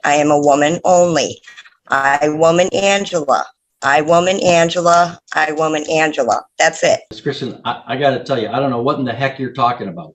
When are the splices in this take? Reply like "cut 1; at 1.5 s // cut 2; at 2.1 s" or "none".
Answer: cut 1; at 7.1 s